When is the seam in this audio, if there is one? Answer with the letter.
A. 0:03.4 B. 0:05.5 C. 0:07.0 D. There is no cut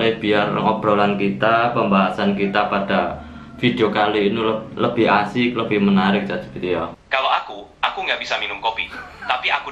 C